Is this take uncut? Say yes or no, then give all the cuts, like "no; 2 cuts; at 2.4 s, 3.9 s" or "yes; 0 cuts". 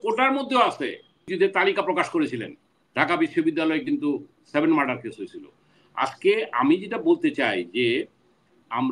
no; 1 cut; at 1.3 s